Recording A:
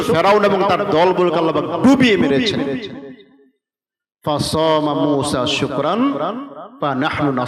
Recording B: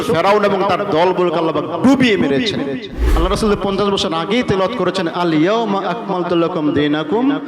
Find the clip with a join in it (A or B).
B